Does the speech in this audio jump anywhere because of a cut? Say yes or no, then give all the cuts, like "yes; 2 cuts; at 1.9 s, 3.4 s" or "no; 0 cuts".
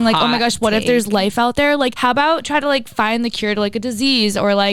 yes; 1 cut; at 2.0 s